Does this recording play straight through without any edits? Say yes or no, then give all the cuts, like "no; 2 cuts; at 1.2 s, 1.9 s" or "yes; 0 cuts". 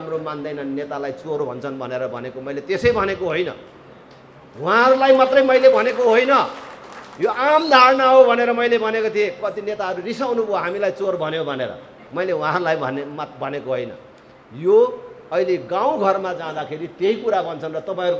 yes; 0 cuts